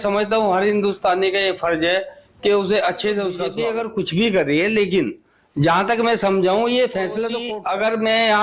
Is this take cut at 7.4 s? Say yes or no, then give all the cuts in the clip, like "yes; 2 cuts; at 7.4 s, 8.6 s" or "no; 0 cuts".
yes; 2 cuts; at 3.5 s, 7.4 s